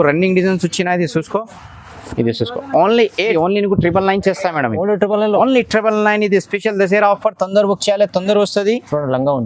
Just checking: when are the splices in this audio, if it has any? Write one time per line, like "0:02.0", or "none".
0:03.3